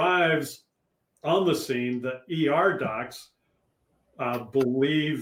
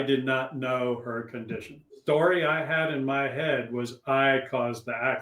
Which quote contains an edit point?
second; 1 cut; at 2.0 s

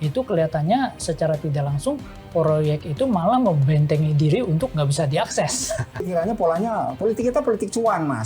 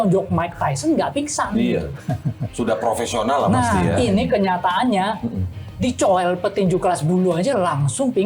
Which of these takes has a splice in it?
first; 1 cut; at 6.1 s

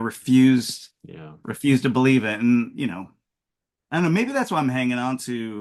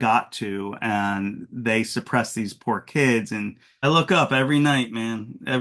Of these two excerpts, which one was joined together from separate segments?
second; 1 cut; at 3.8 s

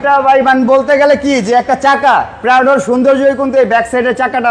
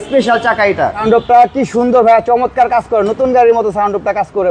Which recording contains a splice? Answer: second; 1 cut; at 1.0 s

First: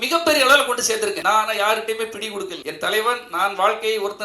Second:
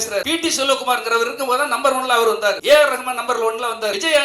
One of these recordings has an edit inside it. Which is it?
first; 1 cut; at 1.2 s

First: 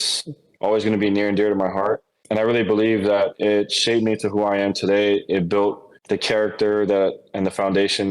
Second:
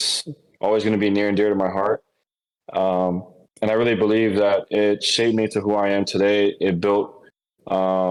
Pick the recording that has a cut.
first; 2 cuts; at 2.1 s, 5.9 s

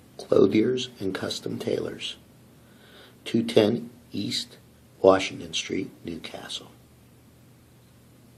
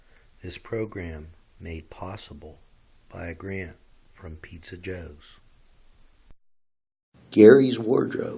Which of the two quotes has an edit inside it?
second; 1 cut; at 6.4 s

